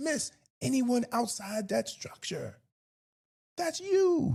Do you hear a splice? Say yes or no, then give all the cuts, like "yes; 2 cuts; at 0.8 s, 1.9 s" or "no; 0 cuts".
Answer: no; 0 cuts